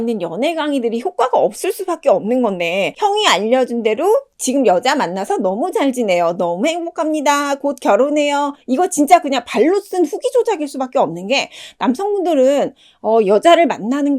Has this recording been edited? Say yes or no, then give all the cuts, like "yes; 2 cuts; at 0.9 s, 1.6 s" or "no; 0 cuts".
yes; 2 cuts; at 2.9 s, 8.6 s